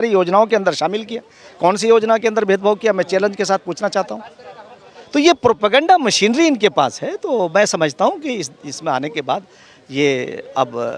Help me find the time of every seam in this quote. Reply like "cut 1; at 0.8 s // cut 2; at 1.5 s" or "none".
none